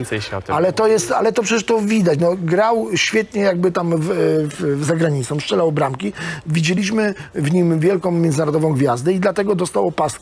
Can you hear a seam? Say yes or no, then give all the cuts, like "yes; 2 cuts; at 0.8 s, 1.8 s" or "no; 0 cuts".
no; 0 cuts